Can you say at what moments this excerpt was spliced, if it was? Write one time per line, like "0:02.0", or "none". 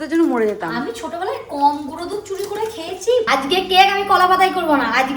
0:03.3

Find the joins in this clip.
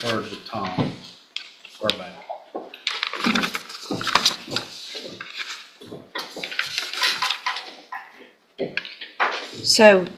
none

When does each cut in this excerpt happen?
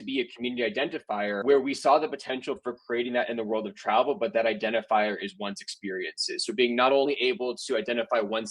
0:01.4

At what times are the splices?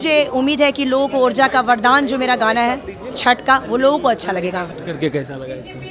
0:04.7

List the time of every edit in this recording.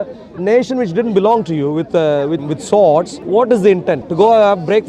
0:02.4
0:03.2
0:04.1

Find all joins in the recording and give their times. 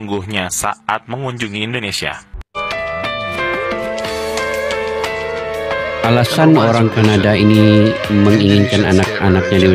0:02.4

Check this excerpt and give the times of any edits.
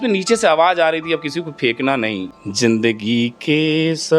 0:02.4

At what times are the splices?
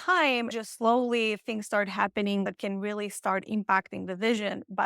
0:02.5

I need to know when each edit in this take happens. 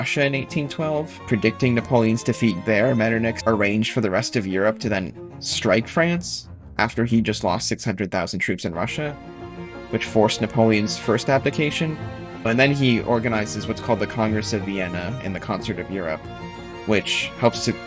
0:01.2
0:03.4
0:12.5

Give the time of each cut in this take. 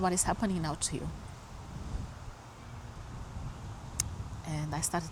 none

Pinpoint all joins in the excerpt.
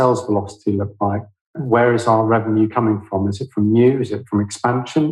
0:01.5

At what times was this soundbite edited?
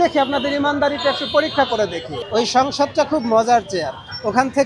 0:02.1

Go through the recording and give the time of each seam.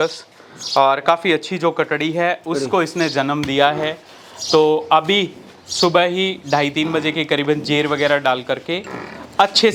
none

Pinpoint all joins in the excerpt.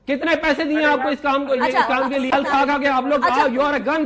0:02.3

